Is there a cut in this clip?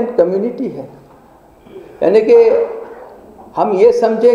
no; 0 cuts

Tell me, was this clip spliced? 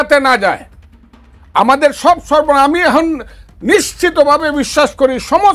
no; 0 cuts

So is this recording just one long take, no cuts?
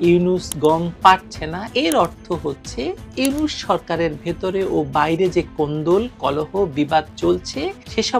no; 1 cut; at 1.6 s

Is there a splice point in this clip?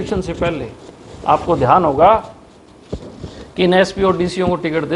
no; 0 cuts

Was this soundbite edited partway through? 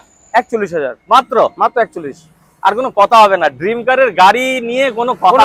no; 0 cuts

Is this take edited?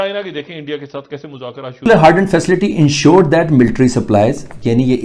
yes; 1 cut; at 1.9 s

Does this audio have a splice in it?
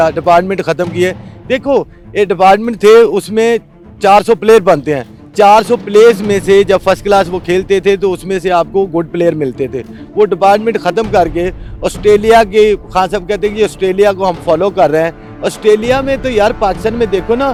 no; 0 cuts

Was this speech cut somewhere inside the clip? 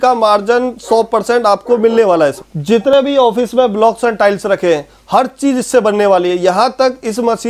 yes; 1 cut; at 2.8 s

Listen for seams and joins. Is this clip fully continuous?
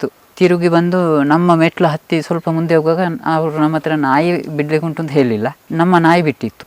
yes; 0 cuts

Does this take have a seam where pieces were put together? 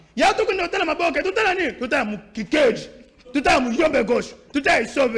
no; 0 cuts

